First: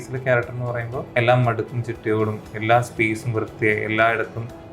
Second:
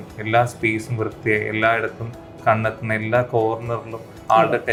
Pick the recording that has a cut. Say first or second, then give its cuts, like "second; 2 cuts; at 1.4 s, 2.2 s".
first; 1 cut; at 1.0 s